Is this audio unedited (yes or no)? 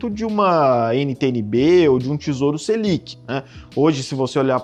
yes